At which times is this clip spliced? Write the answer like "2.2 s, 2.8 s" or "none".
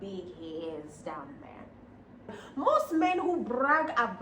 2.4 s